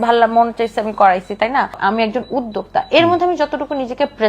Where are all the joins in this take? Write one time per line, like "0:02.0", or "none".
0:01.8